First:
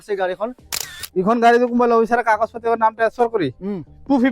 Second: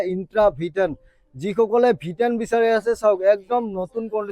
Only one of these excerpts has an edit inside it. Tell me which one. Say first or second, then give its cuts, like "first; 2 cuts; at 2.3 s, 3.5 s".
first; 1 cut; at 1.0 s